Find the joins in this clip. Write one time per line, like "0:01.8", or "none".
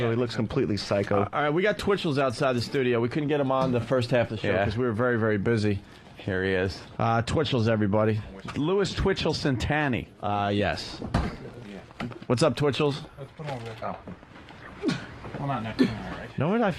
0:01.8